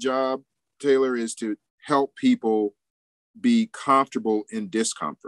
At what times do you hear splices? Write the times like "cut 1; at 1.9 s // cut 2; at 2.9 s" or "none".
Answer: cut 1; at 1.7 s